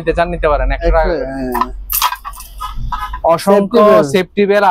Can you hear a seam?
no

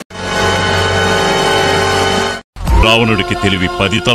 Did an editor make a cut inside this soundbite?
no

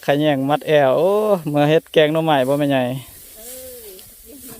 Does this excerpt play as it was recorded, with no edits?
no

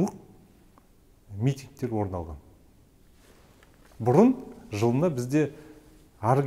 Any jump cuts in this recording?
no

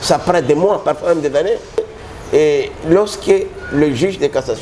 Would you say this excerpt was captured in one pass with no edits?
no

